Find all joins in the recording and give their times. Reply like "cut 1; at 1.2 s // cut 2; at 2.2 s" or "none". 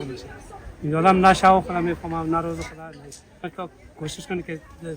cut 1; at 3.5 s